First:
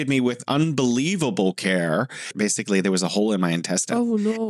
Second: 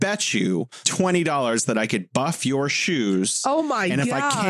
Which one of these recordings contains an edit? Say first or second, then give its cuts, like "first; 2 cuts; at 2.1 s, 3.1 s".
first; 1 cut; at 2.3 s